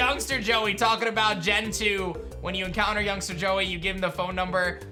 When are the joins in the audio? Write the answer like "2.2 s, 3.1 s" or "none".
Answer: none